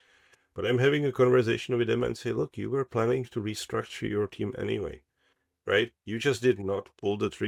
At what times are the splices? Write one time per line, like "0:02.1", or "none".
none